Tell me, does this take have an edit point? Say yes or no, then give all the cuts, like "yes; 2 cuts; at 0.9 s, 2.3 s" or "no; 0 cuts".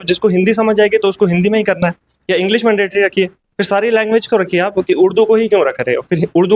no; 0 cuts